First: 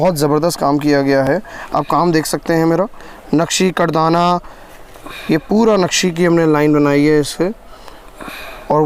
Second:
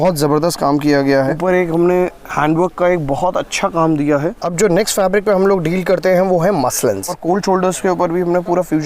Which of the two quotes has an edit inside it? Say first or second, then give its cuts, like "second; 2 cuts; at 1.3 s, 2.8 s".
second; 3 cuts; at 1.2 s, 4.4 s, 7.2 s